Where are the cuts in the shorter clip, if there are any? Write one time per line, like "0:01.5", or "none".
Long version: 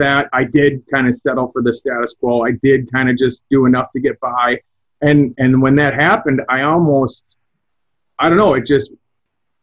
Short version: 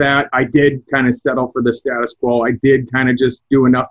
none